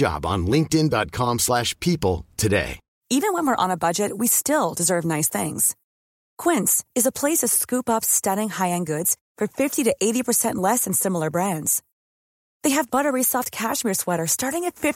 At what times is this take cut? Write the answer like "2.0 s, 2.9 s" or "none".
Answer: 2.8 s